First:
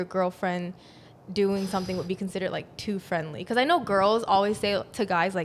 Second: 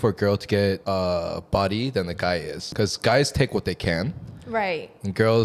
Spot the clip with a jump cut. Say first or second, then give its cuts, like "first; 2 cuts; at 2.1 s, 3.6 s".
second; 2 cuts; at 0.8 s, 2.6 s